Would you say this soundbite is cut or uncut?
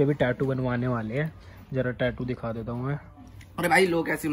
uncut